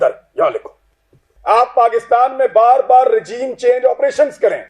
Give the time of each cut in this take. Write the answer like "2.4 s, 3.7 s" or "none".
1.3 s